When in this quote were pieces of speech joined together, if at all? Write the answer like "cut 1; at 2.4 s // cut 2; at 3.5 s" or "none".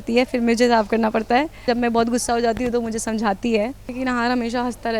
cut 1; at 1.6 s // cut 2; at 3.9 s

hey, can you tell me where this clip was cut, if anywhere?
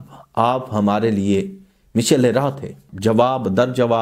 cut 1; at 2.9 s

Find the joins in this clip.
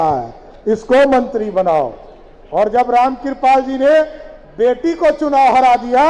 none

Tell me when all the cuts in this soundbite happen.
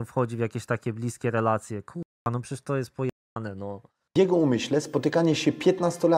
none

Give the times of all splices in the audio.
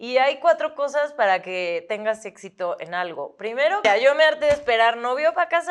cut 1; at 3.8 s

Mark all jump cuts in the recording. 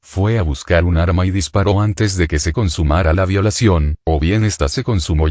cut 1; at 3.7 s

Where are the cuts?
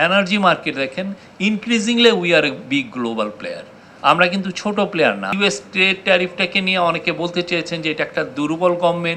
cut 1; at 5.3 s

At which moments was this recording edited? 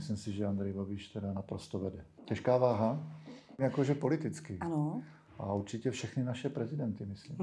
cut 1; at 2.1 s // cut 2; at 3.6 s

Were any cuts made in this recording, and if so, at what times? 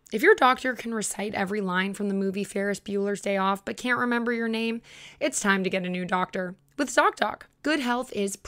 cut 1; at 7.5 s

